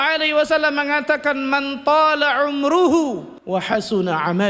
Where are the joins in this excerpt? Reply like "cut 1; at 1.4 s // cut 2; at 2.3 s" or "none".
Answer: cut 1; at 3.3 s